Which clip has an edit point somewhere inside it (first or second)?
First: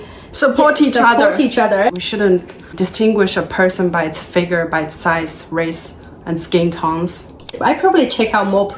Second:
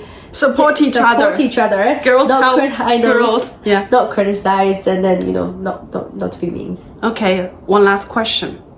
first